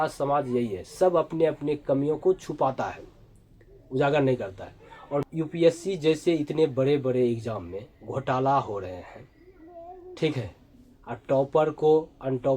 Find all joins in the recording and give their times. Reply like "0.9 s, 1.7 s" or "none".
5.2 s